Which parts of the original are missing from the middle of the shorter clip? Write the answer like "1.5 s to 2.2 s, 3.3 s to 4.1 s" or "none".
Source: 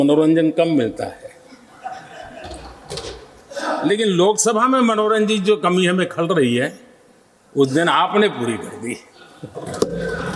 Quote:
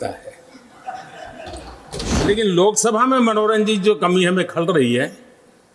3.2 s to 3.8 s